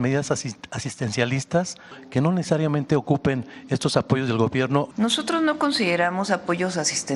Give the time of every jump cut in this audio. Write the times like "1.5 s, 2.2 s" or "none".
2.0 s, 4.9 s